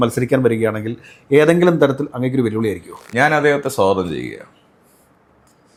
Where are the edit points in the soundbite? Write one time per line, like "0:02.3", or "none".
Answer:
none